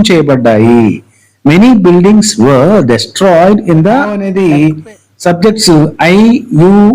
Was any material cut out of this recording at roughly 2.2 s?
no; 1 cut; at 4.2 s

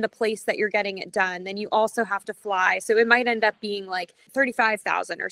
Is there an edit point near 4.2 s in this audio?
yes; 1 cut; at 4.2 s

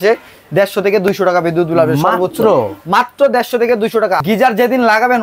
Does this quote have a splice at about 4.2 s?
yes; 1 cut; at 4.2 s

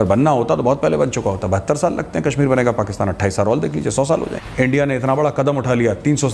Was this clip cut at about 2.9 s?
no; 1 cut; at 4.4 s

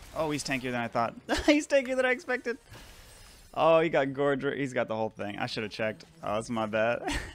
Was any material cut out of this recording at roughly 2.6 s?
no; 0 cuts

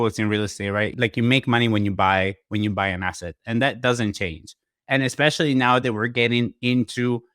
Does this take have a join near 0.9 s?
yes; 1 cut; at 0.9 s

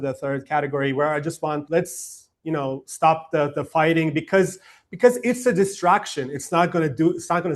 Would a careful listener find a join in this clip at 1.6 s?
yes; 1 cut; at 1.6 s

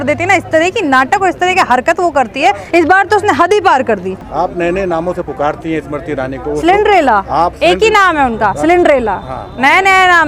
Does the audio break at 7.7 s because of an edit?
no; 1 cut; at 4.3 s

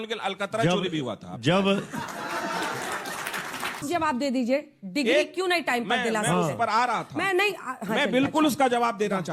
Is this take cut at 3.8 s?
yes; 2 cuts; at 1.4 s, 3.8 s

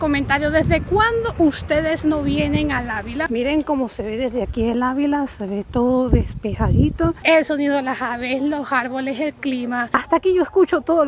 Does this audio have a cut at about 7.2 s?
yes; 3 cuts; at 3.3 s, 7.2 s, 9.8 s

